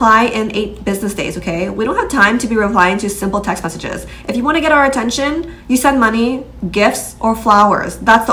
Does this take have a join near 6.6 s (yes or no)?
no